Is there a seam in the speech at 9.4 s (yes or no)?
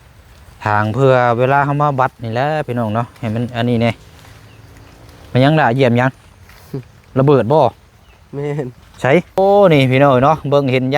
yes